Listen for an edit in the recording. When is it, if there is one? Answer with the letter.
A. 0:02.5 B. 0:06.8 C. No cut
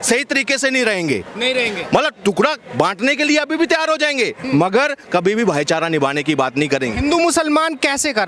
C